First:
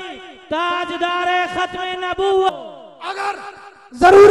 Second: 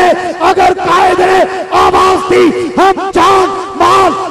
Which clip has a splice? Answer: first; 1 cut; at 2.5 s

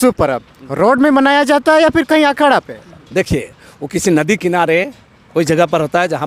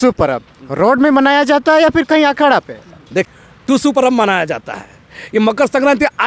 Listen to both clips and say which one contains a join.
second; 1 cut; at 3.3 s

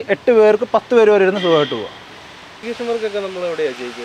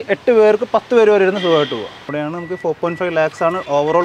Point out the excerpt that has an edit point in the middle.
second; 1 cut; at 2.1 s

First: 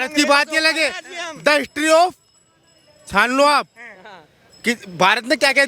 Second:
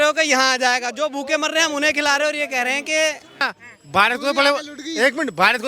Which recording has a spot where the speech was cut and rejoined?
second; 1 cut; at 3.4 s

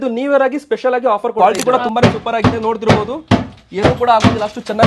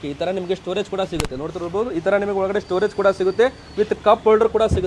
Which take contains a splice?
first; 1 cut; at 1.3 s

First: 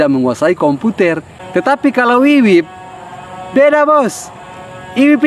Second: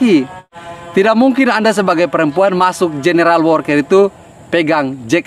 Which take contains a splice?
first; 1 cut; at 1.3 s

